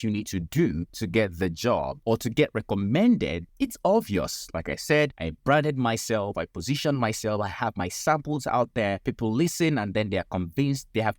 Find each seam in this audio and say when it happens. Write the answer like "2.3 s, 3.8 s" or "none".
0.9 s, 1.9 s, 3.4 s, 5.3 s, 9.0 s